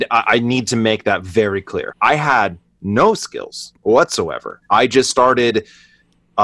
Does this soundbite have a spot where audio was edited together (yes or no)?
yes